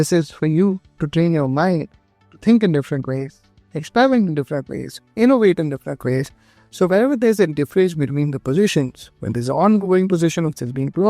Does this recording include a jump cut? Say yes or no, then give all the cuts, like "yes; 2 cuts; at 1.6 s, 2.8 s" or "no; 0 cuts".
yes; 1 cut; at 6.5 s